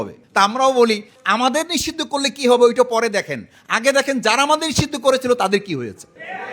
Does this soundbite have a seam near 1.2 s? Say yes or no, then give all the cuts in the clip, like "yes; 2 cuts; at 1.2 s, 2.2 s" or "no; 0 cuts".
yes; 1 cut; at 1.2 s